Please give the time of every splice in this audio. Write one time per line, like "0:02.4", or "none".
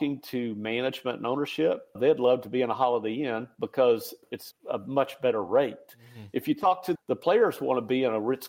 0:02.0
0:04.3
0:07.0